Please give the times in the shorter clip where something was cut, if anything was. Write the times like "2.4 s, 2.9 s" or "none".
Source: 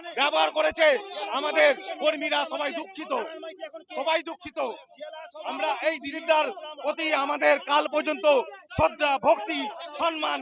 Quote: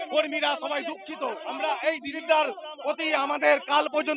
1.4 s